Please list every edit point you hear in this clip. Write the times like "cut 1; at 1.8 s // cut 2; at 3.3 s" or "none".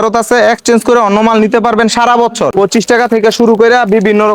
cut 1; at 2.5 s